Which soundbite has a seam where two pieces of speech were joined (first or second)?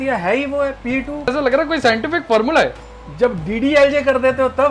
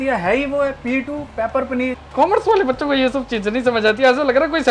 first